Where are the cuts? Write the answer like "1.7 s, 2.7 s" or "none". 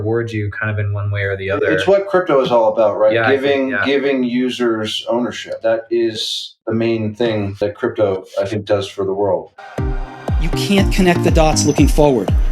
5.6 s, 6.5 s, 7.6 s, 9.5 s